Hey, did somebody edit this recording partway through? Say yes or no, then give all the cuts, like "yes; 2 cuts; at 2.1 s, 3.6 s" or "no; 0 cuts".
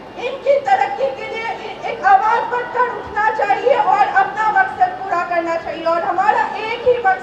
no; 0 cuts